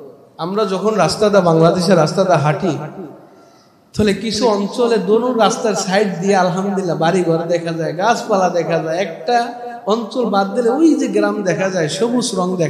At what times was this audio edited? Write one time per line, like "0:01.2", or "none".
none